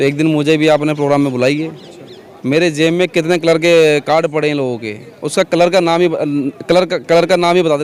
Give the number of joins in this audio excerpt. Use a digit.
0